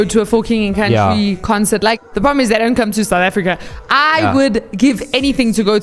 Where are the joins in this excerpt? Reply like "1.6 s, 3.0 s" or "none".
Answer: 2.0 s